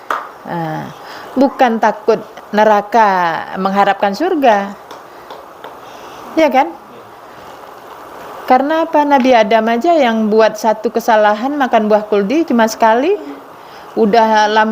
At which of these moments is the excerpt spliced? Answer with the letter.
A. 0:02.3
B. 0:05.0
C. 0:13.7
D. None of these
A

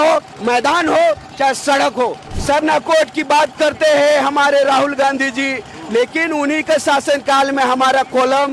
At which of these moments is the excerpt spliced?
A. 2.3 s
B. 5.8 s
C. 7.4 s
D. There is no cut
A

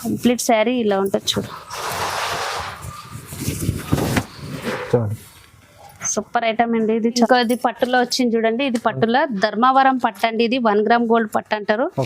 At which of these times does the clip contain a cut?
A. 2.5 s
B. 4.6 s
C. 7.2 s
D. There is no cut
C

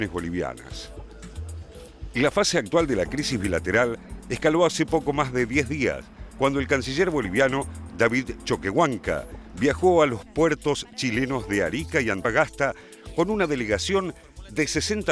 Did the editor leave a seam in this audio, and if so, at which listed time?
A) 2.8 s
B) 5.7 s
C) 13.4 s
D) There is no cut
B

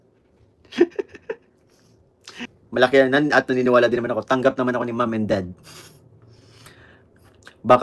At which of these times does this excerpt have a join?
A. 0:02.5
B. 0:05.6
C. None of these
A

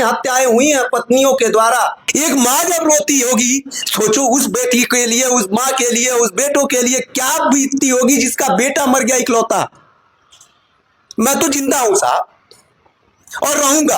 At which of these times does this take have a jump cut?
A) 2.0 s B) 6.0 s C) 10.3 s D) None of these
A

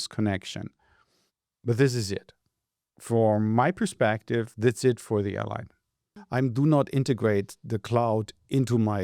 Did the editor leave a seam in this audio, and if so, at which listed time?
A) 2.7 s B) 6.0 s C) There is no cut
B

